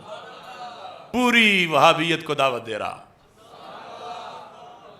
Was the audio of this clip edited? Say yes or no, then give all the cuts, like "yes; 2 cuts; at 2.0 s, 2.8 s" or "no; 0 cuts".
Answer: yes; 1 cut; at 1.1 s